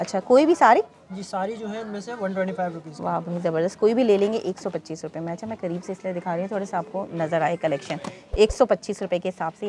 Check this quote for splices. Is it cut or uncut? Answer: uncut